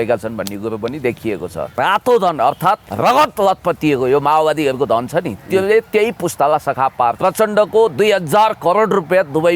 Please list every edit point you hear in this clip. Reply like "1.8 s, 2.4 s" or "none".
1.7 s, 2.9 s, 7.2 s